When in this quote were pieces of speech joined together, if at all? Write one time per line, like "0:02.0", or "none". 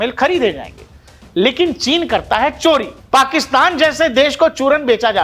0:02.9